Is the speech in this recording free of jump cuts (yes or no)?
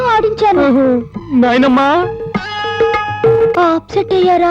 no